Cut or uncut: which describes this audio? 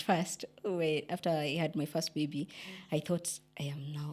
uncut